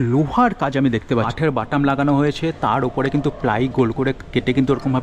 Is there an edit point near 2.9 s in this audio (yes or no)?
no